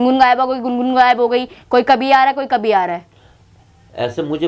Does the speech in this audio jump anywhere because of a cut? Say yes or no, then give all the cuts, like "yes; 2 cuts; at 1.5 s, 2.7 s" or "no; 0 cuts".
no; 0 cuts